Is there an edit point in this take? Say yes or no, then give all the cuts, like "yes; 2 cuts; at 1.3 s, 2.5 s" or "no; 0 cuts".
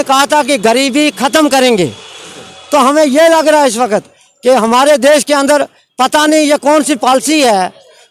no; 0 cuts